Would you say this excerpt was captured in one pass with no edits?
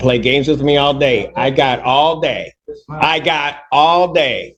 yes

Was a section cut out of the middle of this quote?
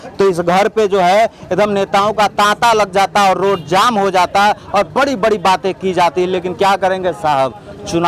no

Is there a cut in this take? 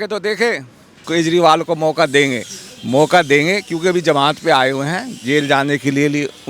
yes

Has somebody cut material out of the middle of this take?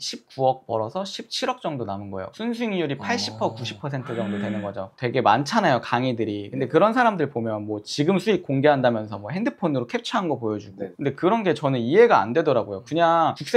no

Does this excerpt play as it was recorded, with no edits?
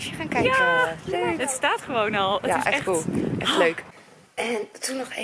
no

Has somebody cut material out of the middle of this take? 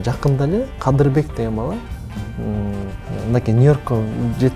yes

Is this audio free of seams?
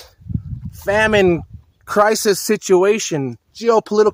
yes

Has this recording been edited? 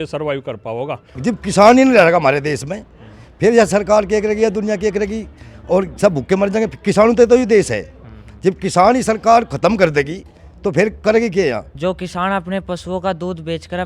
yes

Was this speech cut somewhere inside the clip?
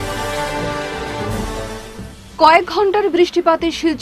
no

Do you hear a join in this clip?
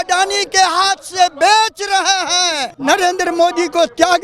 yes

